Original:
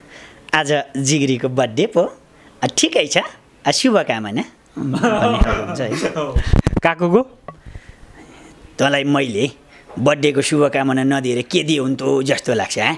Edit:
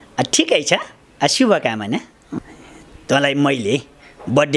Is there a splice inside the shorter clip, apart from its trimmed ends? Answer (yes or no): yes